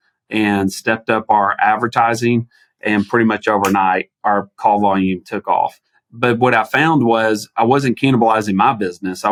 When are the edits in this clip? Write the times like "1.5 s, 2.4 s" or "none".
none